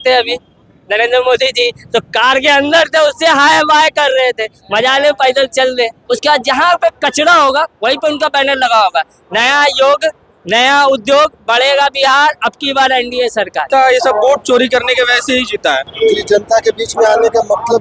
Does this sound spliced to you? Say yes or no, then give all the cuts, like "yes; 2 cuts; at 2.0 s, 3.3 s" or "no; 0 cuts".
yes; 3 cuts; at 6.0 s, 13.6 s, 15.9 s